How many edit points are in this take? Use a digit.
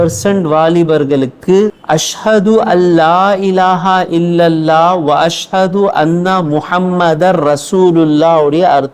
1